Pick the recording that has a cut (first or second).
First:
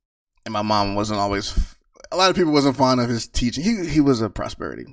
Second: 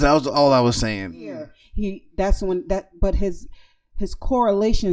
second